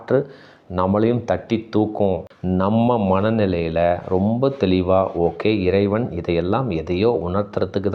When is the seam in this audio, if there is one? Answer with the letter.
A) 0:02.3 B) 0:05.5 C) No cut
A